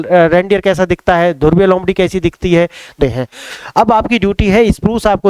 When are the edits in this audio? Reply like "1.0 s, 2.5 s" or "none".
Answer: 3.0 s